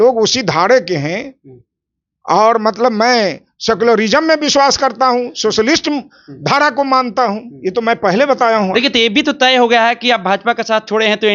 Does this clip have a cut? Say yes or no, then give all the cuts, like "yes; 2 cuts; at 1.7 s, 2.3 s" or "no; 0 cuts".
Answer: no; 0 cuts